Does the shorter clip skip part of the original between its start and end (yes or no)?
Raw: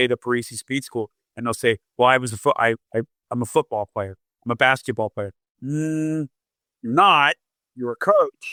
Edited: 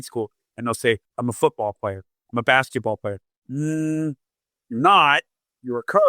yes